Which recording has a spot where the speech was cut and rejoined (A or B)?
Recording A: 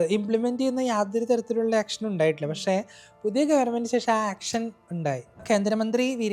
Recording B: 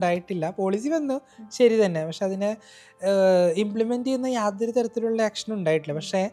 A